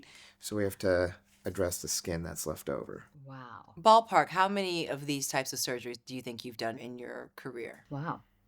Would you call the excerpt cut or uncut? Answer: cut